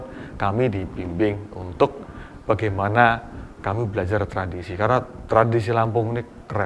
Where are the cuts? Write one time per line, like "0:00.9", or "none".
none